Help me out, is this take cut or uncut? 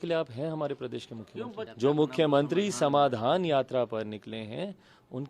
cut